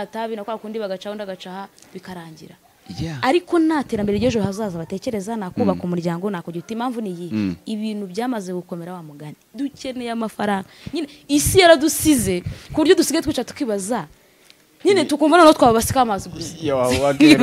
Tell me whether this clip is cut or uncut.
cut